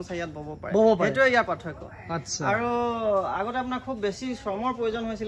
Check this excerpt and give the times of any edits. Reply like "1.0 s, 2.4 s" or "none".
none